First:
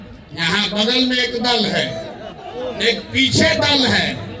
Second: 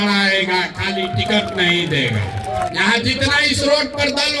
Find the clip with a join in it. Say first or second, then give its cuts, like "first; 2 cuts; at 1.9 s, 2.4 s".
second; 1 cut; at 2.7 s